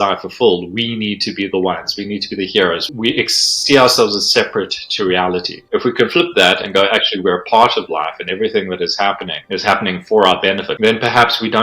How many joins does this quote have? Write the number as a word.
four